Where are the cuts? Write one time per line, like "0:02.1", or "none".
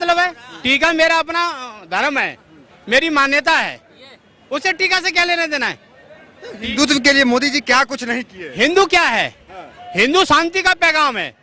none